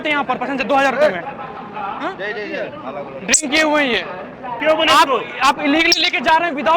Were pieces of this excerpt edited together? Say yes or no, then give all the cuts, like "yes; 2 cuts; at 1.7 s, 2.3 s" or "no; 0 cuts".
yes; 2 cuts; at 1.6 s, 4.6 s